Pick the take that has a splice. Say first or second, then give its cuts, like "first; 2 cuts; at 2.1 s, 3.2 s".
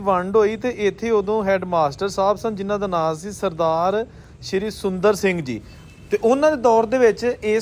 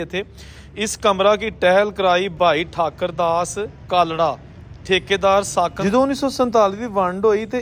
second; 1 cut; at 5.8 s